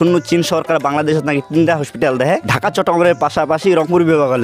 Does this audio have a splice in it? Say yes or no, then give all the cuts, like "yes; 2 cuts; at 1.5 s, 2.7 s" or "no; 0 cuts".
yes; 1 cut; at 2.5 s